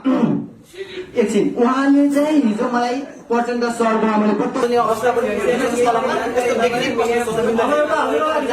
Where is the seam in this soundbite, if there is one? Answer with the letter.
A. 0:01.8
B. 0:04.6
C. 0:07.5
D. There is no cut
B